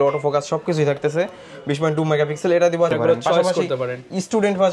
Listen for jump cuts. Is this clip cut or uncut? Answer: cut